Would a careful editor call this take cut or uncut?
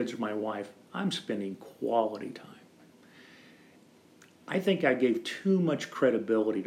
uncut